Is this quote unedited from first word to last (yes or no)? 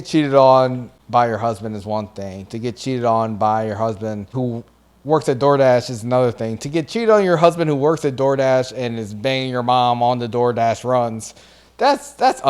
no